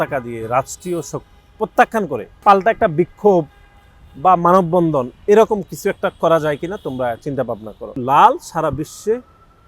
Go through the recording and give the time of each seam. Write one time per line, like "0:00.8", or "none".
0:02.4
0:08.0